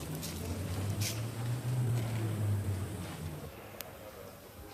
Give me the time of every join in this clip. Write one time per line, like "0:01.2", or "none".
none